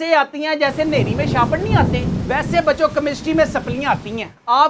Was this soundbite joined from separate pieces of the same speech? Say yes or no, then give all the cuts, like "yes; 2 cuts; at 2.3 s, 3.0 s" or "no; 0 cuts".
no; 0 cuts